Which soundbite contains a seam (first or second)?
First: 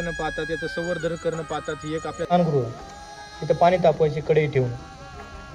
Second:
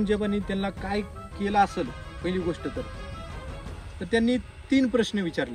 first